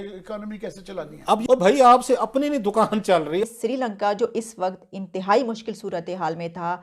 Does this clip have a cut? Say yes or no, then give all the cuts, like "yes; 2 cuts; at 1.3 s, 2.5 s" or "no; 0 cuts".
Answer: yes; 2 cuts; at 1.4 s, 3.5 s